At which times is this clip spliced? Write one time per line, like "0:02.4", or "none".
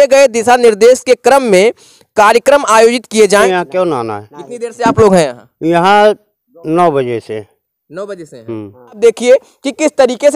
0:03.4
0:09.0